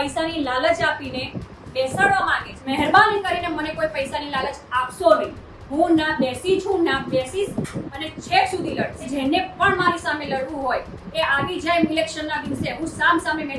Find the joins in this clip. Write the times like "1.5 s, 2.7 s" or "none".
2.5 s, 9.1 s